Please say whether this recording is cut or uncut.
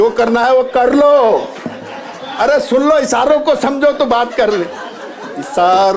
uncut